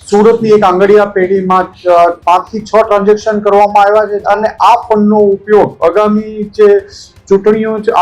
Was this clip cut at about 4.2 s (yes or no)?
yes